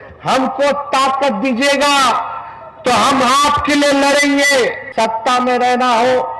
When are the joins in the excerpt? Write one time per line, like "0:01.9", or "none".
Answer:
0:04.8

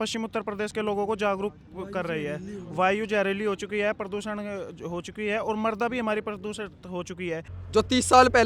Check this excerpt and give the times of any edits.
0:07.5

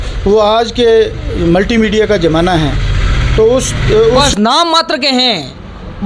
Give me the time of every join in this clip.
0:04.2

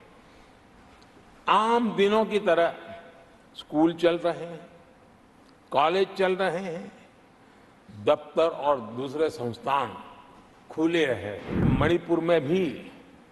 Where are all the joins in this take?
0:11.7

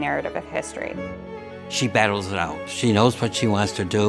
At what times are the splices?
0:01.4
0:02.7

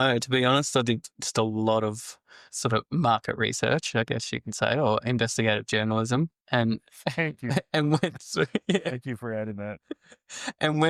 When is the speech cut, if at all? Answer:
none

